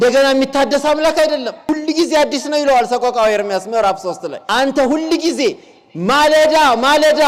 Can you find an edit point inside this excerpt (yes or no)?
yes